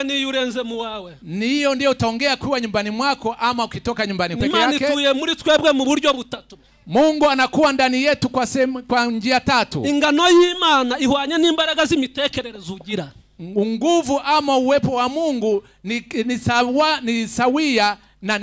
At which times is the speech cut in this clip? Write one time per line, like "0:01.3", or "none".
0:04.4

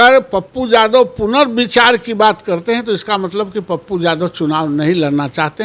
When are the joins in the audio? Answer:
none

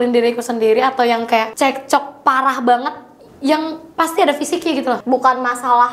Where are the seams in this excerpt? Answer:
0:01.5
0:03.8
0:05.0

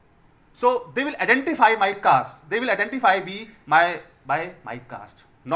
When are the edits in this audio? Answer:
none

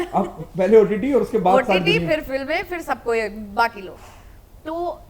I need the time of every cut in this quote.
none

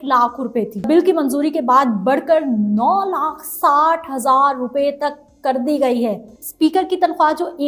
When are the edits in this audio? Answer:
0:00.8
0:06.5

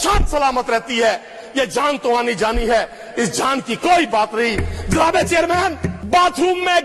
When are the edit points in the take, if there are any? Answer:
0:05.9

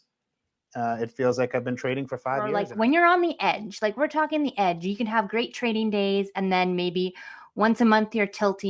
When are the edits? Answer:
0:02.6

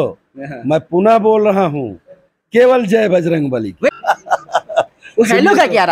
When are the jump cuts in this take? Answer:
0:03.9

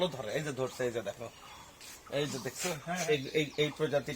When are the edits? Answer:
0:03.0

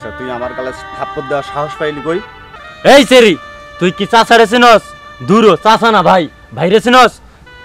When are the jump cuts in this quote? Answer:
0:02.7

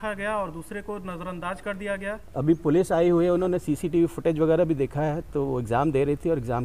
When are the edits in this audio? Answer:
0:02.2

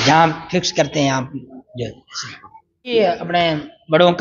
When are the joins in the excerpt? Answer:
0:03.0

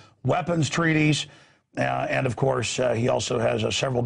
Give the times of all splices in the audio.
0:01.6

